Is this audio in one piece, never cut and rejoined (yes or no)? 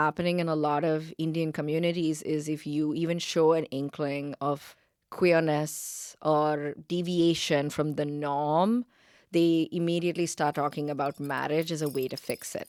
yes